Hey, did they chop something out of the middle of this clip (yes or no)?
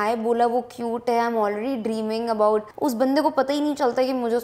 yes